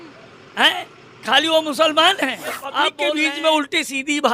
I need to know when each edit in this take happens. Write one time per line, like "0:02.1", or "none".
0:03.0